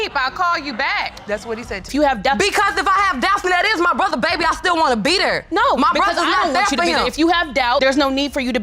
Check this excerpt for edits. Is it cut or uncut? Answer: cut